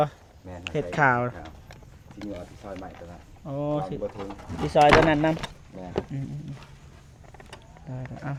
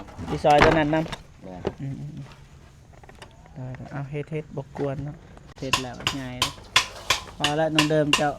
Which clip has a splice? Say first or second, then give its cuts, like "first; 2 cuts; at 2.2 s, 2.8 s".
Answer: second; 1 cut; at 5.6 s